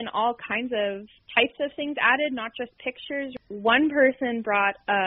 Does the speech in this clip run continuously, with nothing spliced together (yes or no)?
no